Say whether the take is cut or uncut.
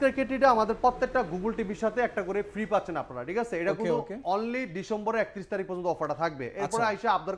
uncut